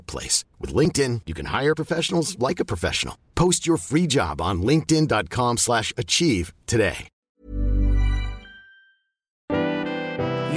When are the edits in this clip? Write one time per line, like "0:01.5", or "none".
0:07.1
0:09.4

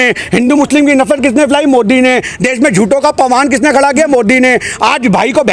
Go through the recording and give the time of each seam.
none

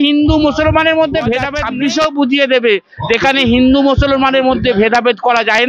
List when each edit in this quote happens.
0:01.6

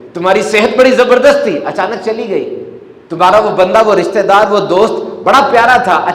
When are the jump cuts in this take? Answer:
none

